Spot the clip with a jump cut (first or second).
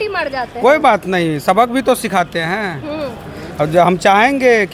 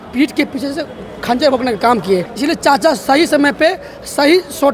second